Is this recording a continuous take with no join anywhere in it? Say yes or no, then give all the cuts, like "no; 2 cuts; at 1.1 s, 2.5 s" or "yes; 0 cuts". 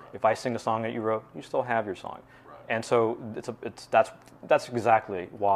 yes; 0 cuts